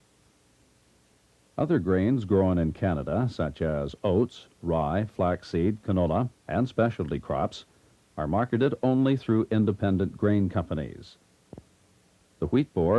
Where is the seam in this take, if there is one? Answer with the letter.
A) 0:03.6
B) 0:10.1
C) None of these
B